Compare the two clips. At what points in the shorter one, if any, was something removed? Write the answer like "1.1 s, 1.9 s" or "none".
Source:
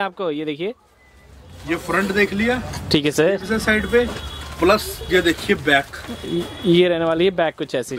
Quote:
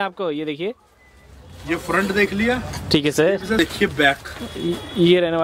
3.6 s